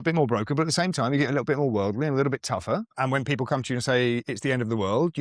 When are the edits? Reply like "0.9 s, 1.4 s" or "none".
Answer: 2.9 s